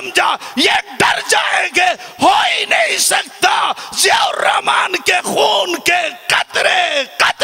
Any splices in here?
no; 0 cuts

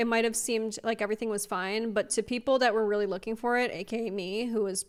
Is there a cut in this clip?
no; 0 cuts

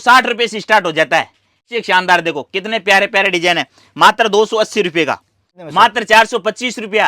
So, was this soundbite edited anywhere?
yes; 2 cuts; at 1.7 s, 5.5 s

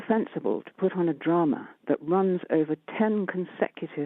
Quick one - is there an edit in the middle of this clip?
yes; 1 cut; at 1.7 s

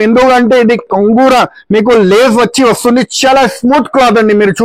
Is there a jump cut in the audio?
no; 0 cuts

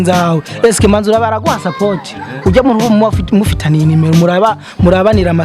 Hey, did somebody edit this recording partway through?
no; 0 cuts

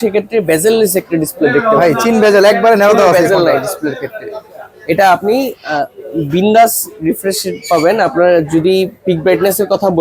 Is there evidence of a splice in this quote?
no; 0 cuts

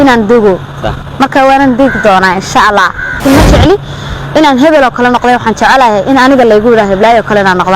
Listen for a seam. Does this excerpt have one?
yes; 1 cut; at 3.2 s

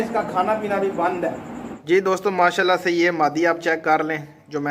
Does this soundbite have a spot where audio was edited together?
yes; 1 cut; at 1.7 s

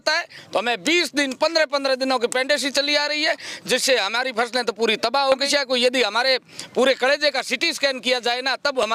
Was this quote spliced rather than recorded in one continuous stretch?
yes; 1 cut; at 5.4 s

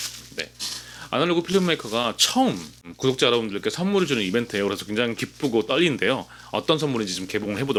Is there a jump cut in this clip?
no; 0 cuts

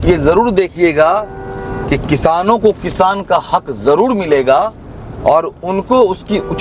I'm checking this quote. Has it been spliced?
no; 0 cuts

